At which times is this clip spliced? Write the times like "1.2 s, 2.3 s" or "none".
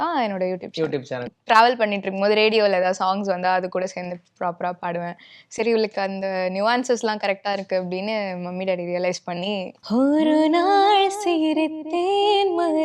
1.2 s, 9.7 s